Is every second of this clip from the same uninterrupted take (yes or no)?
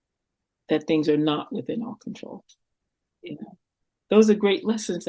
yes